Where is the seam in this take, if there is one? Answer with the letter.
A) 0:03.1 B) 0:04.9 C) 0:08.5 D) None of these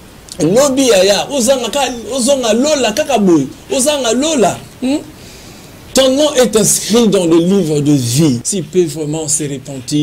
C